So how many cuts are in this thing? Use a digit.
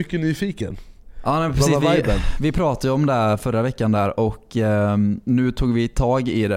0